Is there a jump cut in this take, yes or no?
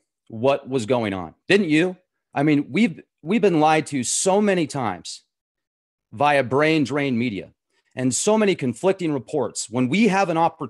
yes